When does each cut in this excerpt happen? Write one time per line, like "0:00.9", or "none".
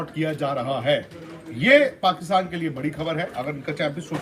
none

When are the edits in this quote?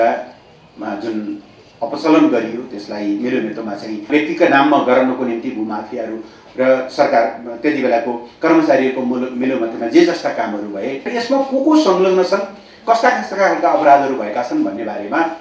0:04.1
0:11.1

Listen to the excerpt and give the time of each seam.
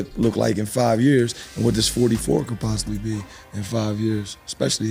none

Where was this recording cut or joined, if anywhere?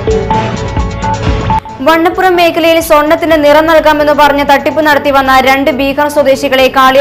0:01.3

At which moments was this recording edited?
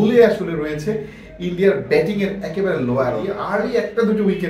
0:03.4

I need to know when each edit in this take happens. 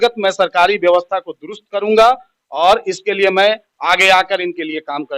none

